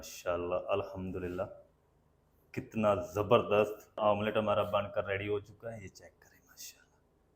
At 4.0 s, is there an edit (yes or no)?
yes